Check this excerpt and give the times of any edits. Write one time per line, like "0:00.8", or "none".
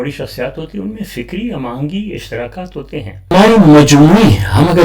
0:03.3